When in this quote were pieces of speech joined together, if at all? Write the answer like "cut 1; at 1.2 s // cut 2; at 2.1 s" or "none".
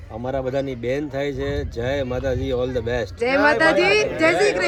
none